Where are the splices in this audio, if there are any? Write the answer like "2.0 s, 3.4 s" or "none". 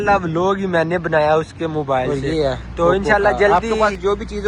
3.5 s